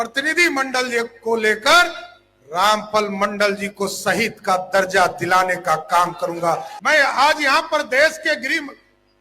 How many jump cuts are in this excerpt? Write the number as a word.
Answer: one